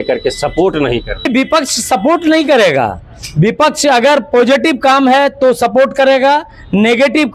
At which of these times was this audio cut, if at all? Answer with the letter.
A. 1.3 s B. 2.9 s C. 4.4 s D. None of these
A